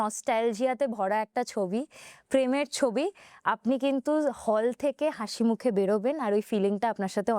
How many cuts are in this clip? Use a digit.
0